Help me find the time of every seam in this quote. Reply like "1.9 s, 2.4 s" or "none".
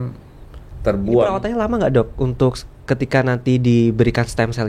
1.4 s

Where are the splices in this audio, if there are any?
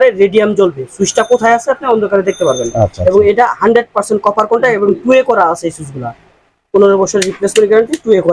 none

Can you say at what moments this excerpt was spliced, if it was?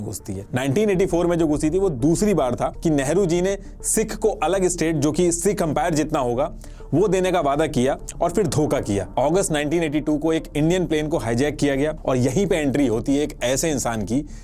2.7 s, 9.1 s, 12.0 s

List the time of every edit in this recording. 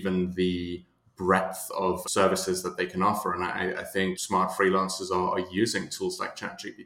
2.0 s, 4.2 s

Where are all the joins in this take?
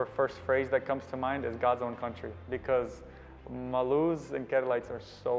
none

